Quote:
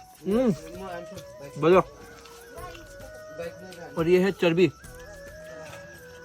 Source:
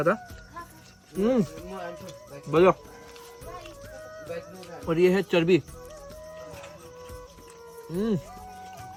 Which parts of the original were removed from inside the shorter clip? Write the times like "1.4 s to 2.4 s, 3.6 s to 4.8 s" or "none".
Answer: none